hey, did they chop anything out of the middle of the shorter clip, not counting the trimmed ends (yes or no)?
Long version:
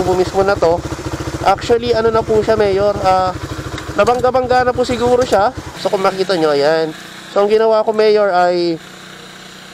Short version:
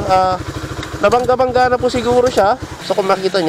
no